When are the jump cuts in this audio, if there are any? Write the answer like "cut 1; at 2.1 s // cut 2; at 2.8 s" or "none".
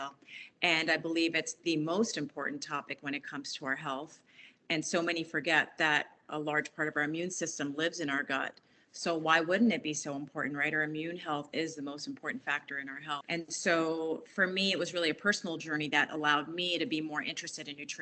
cut 1; at 13.2 s

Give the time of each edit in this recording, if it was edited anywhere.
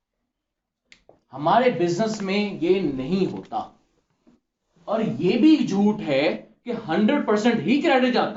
none

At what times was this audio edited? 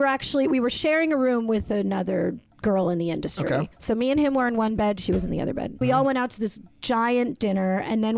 cut 1; at 3.7 s // cut 2; at 5.8 s

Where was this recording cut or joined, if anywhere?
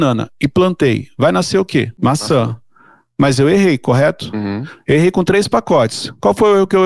cut 1; at 1.9 s

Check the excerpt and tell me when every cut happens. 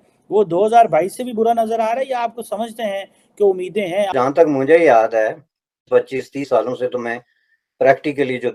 none

